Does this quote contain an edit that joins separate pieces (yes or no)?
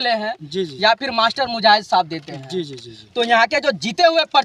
no